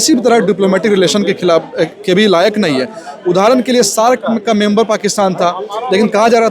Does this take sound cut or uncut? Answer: uncut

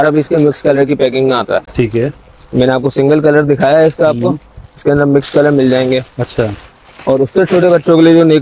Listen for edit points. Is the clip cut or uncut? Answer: uncut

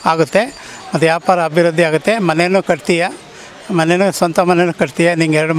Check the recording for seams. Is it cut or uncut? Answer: uncut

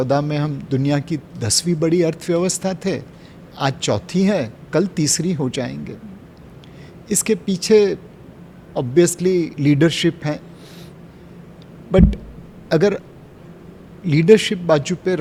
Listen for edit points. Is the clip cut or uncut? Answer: uncut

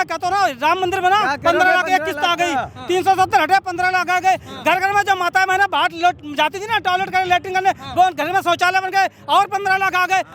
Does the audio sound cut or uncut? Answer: uncut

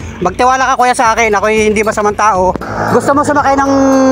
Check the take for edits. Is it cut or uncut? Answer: cut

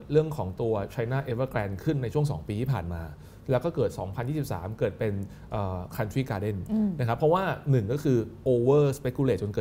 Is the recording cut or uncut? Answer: uncut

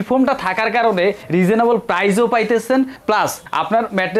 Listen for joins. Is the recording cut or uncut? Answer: cut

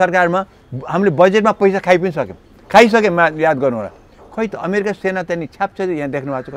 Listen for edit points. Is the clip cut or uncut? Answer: uncut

